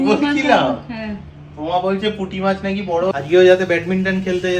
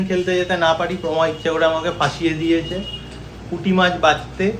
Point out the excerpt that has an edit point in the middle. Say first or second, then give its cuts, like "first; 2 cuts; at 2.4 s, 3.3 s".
first; 1 cut; at 3.1 s